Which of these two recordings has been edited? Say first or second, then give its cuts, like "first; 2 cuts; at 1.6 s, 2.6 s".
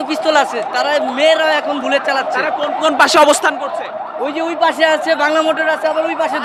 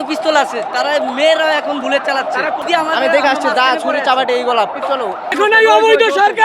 second; 2 cuts; at 2.6 s, 5.3 s